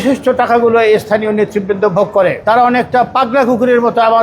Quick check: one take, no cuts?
no; 1 cut; at 2.4 s

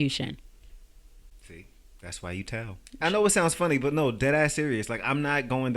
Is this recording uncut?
no; 1 cut; at 3.0 s

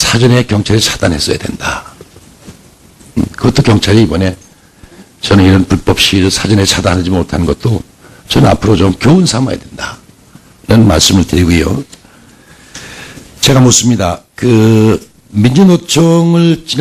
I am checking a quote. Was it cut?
yes; 1 cut; at 12.7 s

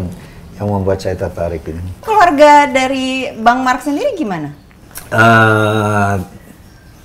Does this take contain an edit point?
yes; 1 cut; at 2.0 s

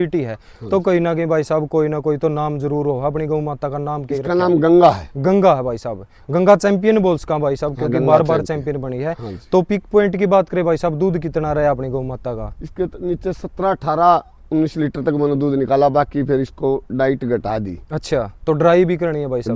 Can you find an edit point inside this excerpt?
no; 0 cuts

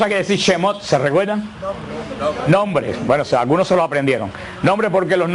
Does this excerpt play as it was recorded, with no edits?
yes; 0 cuts

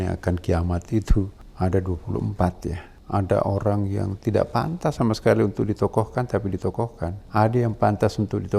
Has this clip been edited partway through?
yes; 3 cuts; at 1.4 s, 2.9 s, 7.2 s

